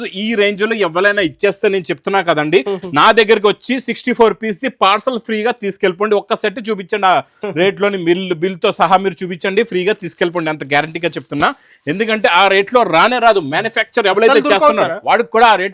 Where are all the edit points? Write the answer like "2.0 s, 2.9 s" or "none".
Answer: none